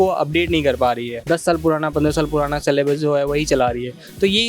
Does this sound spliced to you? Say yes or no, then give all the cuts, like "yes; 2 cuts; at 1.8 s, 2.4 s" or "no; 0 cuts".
no; 0 cuts